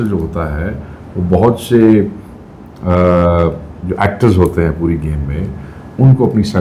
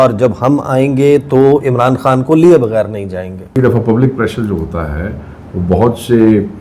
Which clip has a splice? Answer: second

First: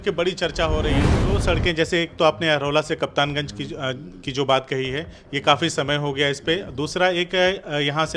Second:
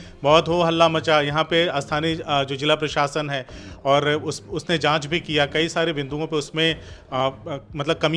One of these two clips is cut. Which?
first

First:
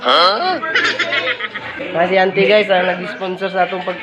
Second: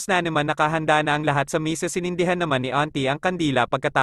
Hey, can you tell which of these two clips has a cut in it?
first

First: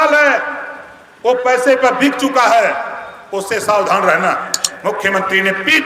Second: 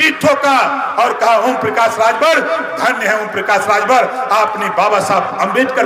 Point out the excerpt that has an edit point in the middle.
first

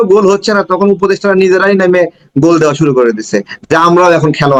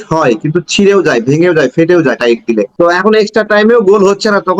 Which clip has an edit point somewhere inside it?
second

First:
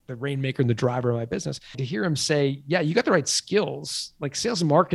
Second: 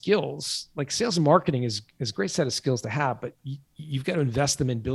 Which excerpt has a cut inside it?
first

